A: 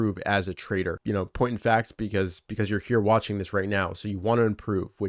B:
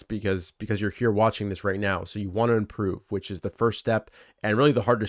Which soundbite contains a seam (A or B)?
A